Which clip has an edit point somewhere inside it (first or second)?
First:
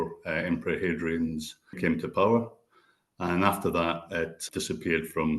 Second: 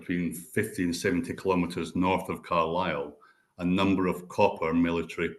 first